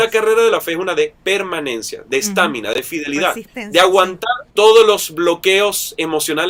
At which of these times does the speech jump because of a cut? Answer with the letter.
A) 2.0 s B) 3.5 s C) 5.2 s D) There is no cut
D